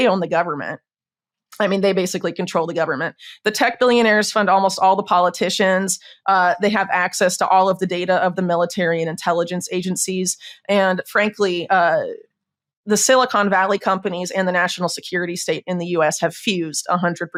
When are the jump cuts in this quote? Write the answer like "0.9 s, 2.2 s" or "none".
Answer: none

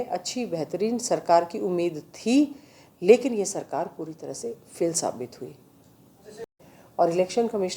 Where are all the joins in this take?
6.6 s

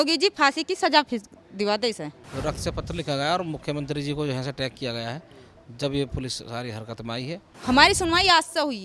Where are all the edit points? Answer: 2.2 s, 7.5 s

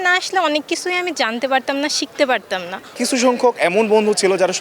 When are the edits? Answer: 3.0 s

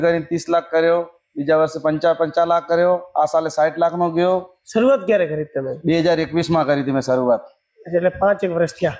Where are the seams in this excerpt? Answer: none

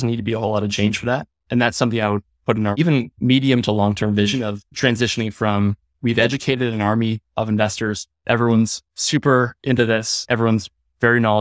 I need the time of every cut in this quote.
2.8 s, 4.6 s, 5.9 s

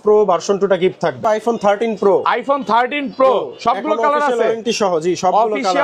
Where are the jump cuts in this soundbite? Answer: 1.2 s

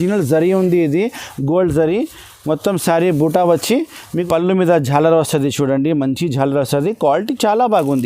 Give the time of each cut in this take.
4.0 s

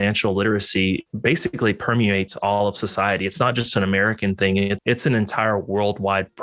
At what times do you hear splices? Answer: 1.1 s, 4.8 s

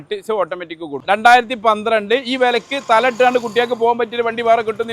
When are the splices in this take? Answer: 1.0 s

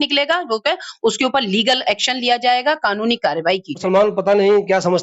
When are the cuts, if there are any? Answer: none

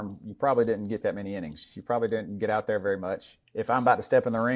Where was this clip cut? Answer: 3.3 s

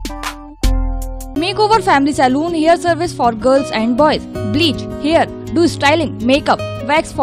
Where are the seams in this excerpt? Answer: 1.3 s

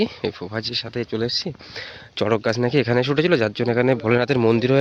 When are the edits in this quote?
none

